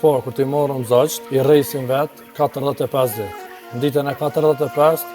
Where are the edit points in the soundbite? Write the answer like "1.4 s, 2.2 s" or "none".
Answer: 1.2 s